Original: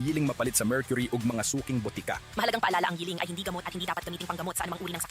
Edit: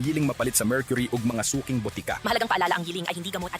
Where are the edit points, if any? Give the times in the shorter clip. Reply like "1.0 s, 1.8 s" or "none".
2.2 s